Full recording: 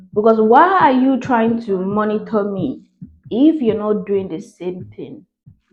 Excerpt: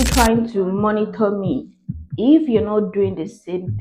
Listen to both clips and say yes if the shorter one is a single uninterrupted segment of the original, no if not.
yes